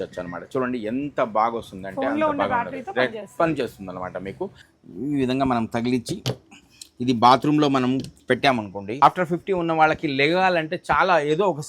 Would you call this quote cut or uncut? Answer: cut